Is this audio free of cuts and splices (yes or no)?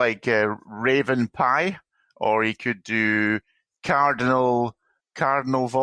yes